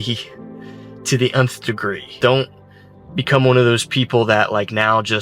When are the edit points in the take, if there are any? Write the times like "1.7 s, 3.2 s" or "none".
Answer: 2.2 s